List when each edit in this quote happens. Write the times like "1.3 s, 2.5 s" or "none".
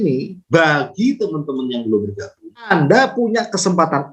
2.7 s